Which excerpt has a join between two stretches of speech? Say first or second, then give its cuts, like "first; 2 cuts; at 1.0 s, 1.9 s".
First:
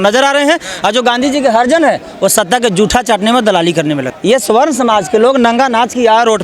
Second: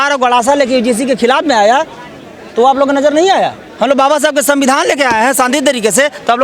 first; 1 cut; at 4.1 s